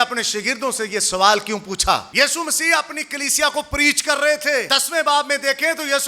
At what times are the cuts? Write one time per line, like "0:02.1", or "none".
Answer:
0:02.1
0:04.7